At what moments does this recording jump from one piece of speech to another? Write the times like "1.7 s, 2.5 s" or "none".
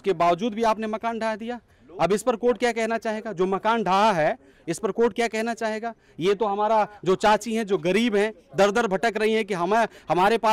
none